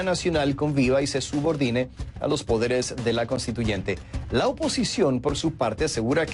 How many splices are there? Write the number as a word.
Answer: one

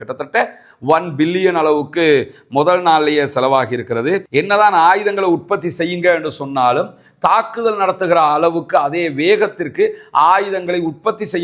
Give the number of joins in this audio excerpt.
one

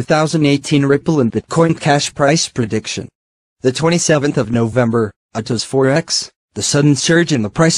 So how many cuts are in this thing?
one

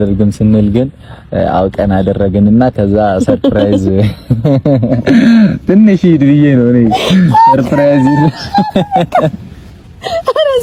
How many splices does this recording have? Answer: zero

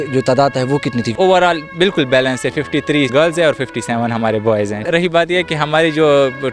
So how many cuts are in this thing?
three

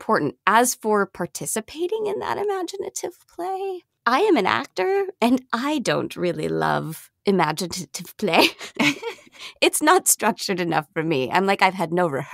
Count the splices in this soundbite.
one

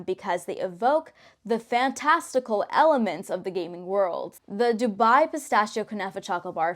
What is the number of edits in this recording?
one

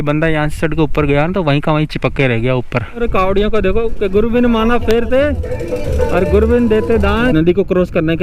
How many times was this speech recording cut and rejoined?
two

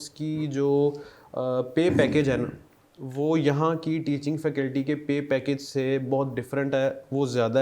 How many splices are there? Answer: zero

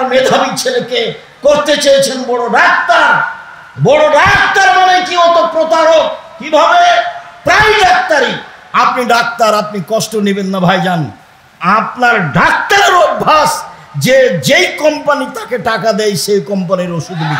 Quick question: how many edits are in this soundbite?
zero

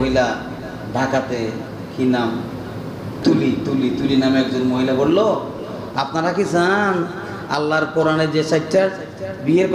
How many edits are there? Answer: one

